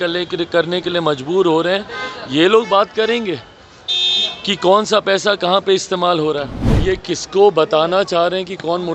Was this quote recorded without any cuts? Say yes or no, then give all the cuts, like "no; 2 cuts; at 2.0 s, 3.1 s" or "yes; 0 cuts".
no; 1 cut; at 6.8 s